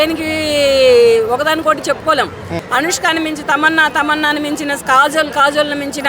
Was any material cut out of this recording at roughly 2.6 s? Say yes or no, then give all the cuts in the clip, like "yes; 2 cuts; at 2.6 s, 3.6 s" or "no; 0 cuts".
yes; 1 cut; at 2.6 s